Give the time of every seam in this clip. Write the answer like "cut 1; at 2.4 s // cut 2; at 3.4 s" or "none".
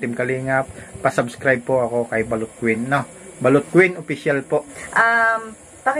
cut 1; at 4.8 s